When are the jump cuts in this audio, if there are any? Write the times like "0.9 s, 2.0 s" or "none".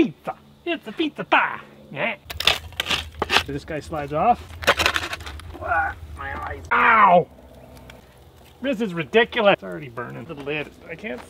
2.3 s, 3.5 s, 4.5 s, 6.7 s